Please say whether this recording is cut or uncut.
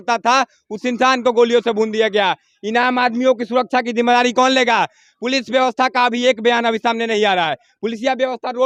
uncut